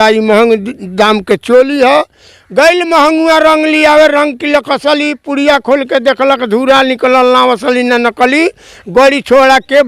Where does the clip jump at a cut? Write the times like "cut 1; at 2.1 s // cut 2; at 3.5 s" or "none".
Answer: none